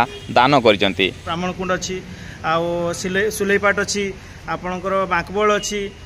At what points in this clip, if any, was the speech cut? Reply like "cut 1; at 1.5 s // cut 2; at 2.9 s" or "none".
cut 1; at 1.2 s